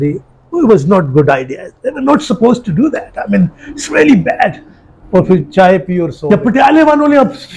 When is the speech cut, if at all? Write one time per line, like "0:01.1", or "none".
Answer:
0:06.1